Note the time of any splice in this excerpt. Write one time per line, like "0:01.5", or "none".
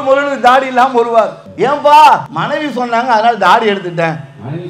0:01.4
0:02.3